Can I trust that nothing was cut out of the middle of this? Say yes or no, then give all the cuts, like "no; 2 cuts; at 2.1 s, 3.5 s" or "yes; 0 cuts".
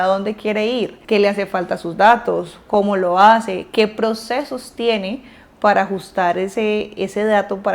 no; 1 cut; at 1.0 s